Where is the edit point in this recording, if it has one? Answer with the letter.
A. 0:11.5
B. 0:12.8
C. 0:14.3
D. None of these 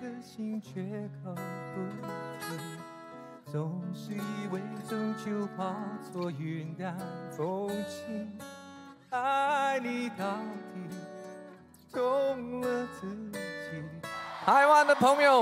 C